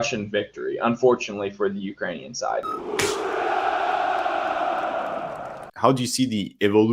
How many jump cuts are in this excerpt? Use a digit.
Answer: 2